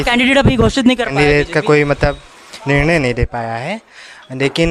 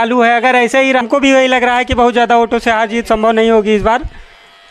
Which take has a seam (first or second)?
second